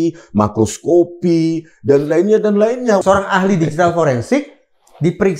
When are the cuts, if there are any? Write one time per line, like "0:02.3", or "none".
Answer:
0:03.0